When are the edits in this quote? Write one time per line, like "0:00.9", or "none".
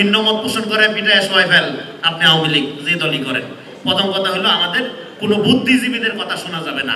0:03.7